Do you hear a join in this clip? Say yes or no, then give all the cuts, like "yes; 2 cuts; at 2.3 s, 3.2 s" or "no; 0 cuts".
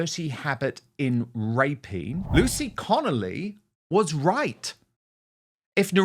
yes; 1 cut; at 2.2 s